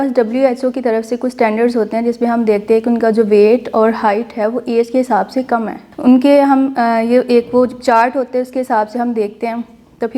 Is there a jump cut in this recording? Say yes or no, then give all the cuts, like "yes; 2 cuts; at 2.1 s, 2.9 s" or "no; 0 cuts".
no; 0 cuts